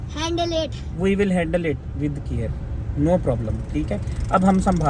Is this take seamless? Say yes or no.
yes